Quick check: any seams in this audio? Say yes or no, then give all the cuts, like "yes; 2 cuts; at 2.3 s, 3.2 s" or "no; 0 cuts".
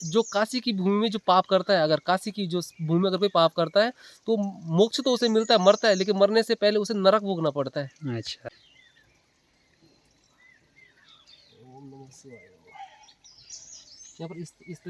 no; 0 cuts